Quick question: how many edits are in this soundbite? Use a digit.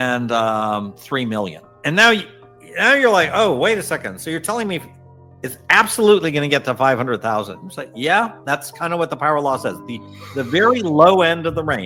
0